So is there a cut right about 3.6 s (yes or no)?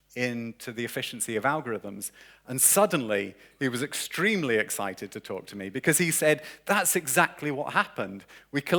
no